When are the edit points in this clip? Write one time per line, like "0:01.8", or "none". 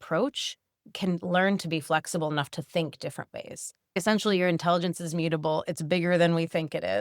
0:03.9